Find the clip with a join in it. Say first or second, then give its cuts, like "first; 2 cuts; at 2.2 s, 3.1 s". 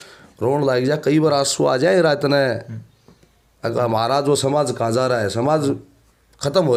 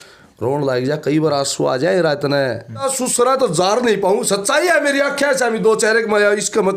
second; 1 cut; at 2.8 s